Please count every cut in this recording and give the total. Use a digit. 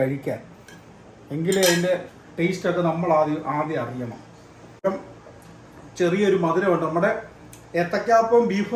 1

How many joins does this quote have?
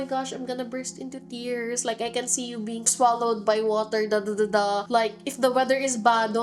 1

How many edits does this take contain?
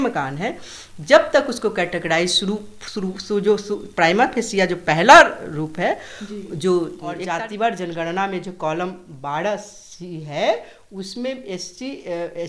1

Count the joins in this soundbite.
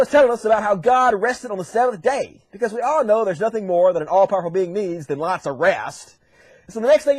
0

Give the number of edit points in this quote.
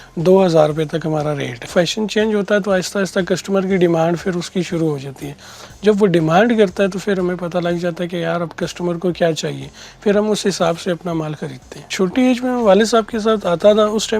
2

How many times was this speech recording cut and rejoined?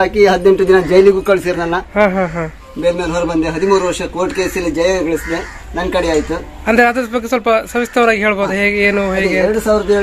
0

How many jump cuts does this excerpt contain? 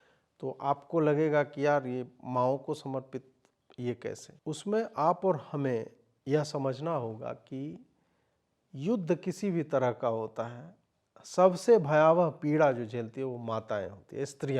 1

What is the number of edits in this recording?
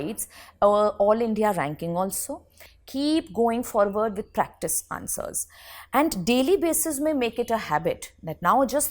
1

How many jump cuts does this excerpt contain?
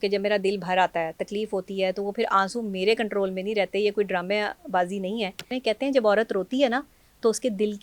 1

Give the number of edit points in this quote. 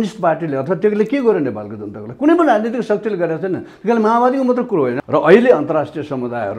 1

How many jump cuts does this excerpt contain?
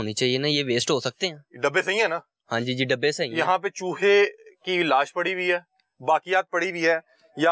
0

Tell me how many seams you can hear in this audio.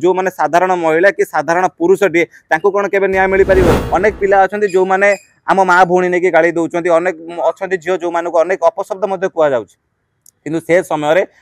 1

